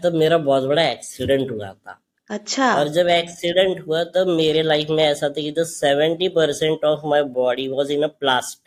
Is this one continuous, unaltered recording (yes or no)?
yes